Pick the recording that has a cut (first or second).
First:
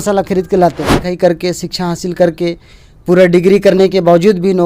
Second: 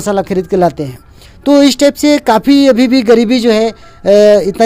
first